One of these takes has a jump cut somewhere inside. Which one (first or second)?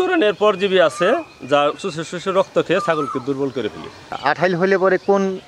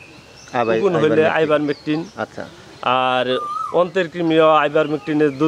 first